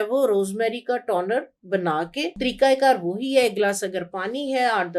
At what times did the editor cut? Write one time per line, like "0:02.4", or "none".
0:02.3